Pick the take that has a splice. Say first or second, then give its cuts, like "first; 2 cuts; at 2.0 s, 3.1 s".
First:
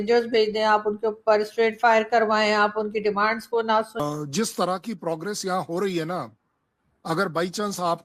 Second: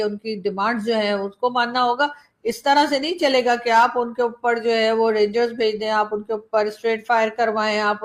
first; 1 cut; at 4.0 s